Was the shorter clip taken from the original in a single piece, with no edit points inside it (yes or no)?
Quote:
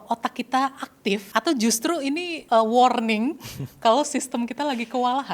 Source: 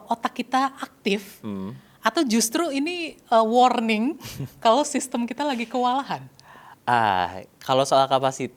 no